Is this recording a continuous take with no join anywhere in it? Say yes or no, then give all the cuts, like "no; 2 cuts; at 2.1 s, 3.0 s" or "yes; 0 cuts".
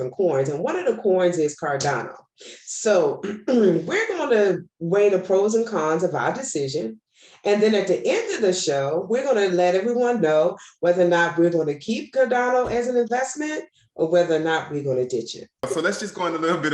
no; 1 cut; at 15.7 s